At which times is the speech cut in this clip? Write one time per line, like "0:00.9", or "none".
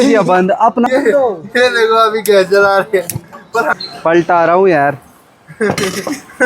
0:03.8